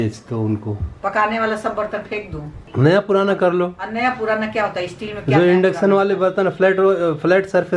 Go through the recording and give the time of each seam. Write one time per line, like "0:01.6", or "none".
0:00.9
0:02.6